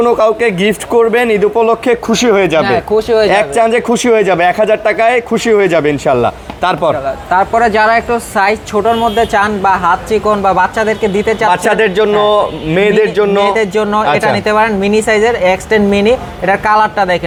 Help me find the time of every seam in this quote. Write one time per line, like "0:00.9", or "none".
none